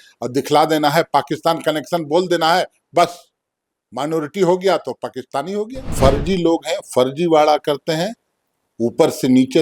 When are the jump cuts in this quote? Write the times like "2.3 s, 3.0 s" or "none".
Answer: 5.9 s